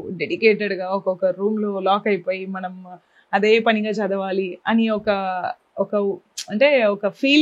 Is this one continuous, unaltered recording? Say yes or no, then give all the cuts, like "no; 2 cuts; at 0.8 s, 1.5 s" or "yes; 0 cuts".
yes; 0 cuts